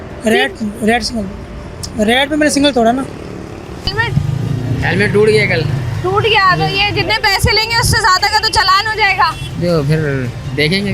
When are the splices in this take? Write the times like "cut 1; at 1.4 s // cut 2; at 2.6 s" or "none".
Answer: cut 1; at 3.9 s